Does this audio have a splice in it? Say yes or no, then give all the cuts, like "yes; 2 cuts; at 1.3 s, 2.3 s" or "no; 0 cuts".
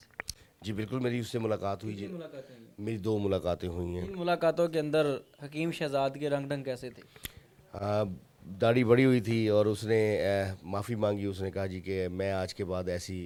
no; 0 cuts